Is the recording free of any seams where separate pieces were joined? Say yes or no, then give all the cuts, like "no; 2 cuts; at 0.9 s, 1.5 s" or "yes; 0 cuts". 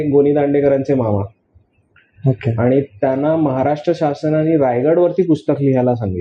yes; 0 cuts